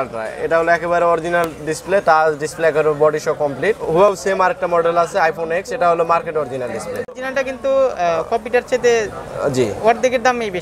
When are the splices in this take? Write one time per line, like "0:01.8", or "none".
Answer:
0:04.1
0:07.2